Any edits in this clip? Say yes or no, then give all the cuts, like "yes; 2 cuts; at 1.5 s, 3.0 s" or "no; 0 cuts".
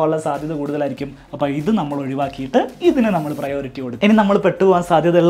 yes; 1 cut; at 4.0 s